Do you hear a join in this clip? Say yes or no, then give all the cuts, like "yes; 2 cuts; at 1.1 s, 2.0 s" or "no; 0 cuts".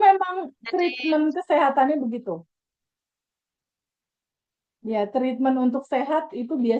no; 0 cuts